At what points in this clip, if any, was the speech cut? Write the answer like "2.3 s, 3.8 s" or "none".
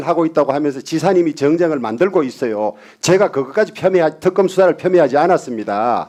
none